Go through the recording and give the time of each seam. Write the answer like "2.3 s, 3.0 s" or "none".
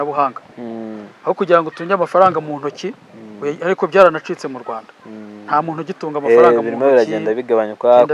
none